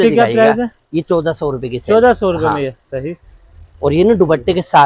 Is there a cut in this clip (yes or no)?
no